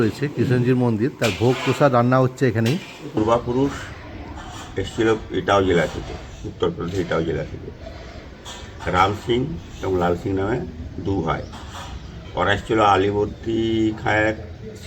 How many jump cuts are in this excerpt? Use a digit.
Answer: 1